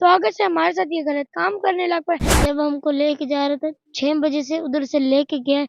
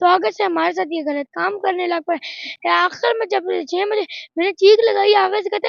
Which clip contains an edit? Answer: first; 1 cut; at 2.3 s

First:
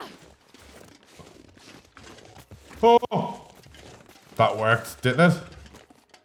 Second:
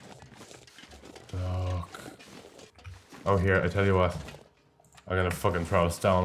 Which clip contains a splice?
second; 1 cut; at 2.7 s

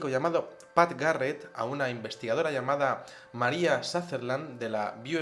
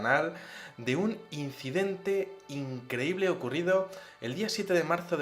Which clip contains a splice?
second; 1 cut; at 0.9 s

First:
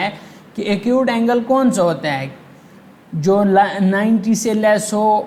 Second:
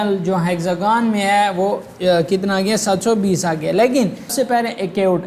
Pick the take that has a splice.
second; 1 cut; at 4.3 s

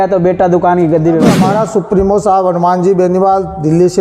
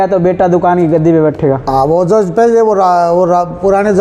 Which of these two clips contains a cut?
first; 1 cut; at 1.4 s

